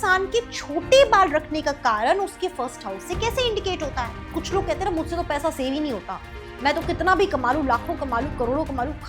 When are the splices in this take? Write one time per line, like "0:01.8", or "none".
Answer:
0:04.3